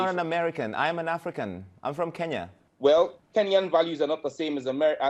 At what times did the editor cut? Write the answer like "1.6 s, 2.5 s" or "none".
2.6 s